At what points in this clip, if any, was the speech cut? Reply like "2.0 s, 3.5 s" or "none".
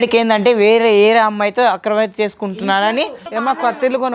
3.2 s